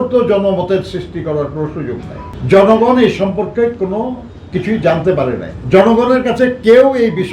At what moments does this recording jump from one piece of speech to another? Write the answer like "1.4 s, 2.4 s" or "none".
2.3 s, 5.5 s